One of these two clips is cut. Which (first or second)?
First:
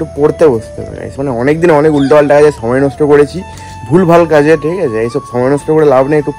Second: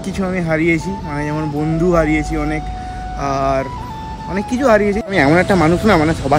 second